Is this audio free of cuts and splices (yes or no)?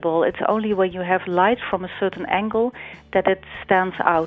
yes